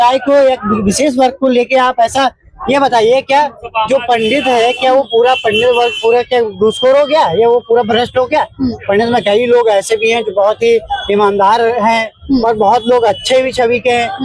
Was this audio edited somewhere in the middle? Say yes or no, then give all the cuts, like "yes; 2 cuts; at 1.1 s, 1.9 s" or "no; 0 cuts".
no; 0 cuts